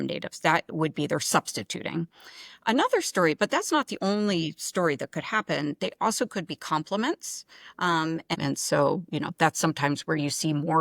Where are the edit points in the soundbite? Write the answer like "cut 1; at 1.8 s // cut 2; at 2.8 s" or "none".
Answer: cut 1; at 8.3 s